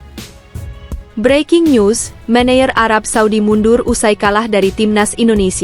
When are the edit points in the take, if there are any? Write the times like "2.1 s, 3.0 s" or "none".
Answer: 1.0 s